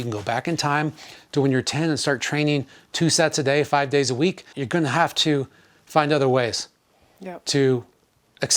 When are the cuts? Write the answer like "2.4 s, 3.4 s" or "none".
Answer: 4.5 s